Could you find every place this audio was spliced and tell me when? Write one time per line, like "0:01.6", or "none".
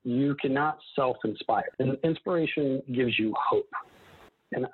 0:01.7

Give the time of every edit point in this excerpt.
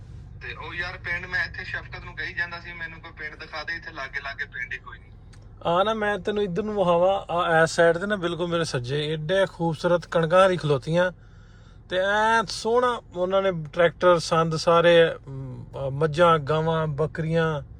none

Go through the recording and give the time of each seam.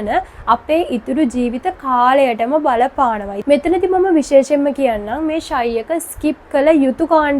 0:03.3

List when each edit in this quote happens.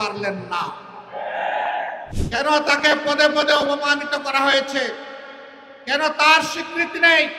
0:02.1

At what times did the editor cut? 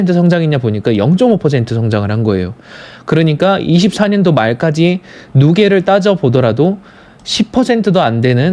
none

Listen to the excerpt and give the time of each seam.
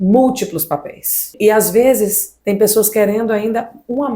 0:01.3

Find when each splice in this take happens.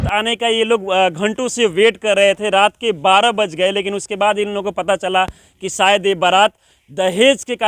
none

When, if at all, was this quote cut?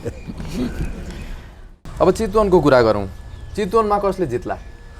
none

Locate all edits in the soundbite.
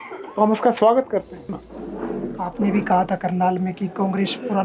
0:01.5

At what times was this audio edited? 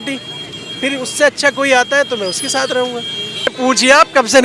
0:03.5

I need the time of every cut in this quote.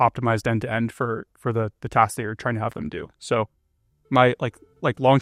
none

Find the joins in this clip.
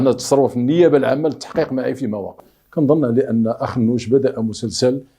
0:02.5

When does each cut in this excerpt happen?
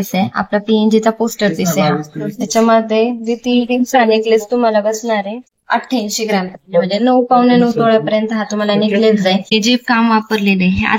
0:05.5
0:09.5

